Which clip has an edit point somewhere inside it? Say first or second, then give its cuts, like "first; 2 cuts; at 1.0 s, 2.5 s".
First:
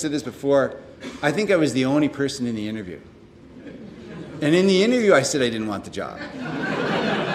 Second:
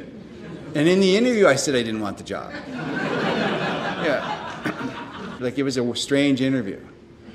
second; 1 cut; at 5.4 s